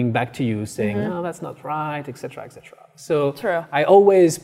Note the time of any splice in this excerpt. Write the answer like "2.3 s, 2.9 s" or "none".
none